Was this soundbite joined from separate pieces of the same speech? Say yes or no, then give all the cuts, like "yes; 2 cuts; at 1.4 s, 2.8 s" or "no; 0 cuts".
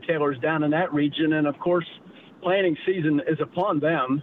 no; 0 cuts